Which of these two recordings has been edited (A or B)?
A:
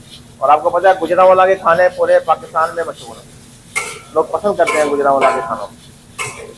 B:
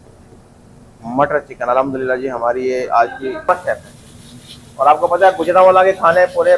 B